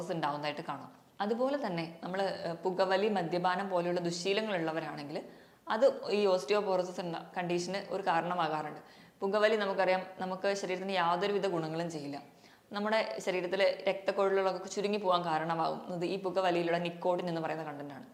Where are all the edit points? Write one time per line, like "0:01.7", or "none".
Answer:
none

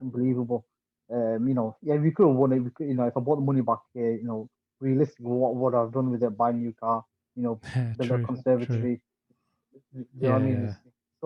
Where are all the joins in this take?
none

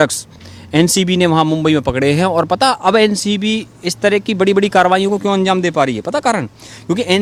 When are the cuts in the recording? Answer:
none

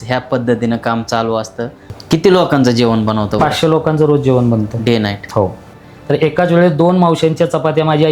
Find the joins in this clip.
0:01.9
0:05.8

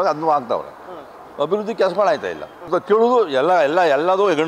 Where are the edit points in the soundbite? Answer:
0:02.7

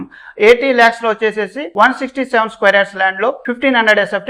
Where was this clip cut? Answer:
none

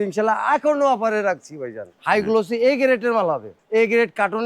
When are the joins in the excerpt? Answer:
0:02.0
0:03.5

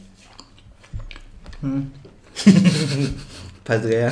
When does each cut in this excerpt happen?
none

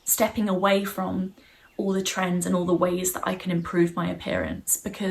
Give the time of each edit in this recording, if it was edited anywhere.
none

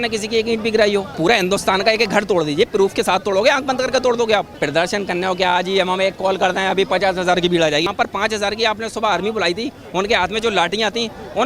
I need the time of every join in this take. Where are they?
0:01.1
0:04.6
0:07.9

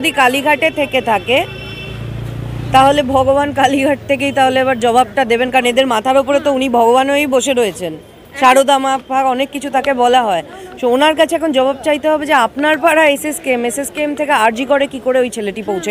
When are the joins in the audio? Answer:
none

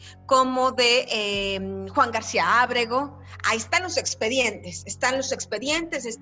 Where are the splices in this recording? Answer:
none

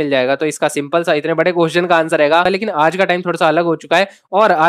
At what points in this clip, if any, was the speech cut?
0:02.5

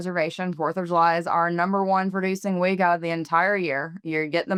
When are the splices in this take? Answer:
none

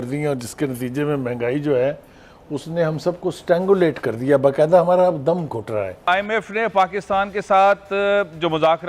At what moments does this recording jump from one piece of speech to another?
0:06.0

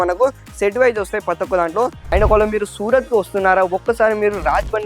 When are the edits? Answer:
0:02.0

